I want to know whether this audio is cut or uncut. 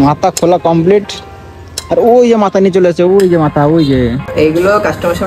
cut